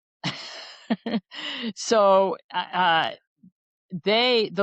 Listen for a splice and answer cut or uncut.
uncut